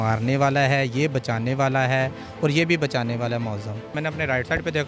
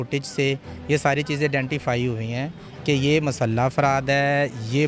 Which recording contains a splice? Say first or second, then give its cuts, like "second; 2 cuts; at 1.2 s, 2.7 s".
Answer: first; 1 cut; at 3.9 s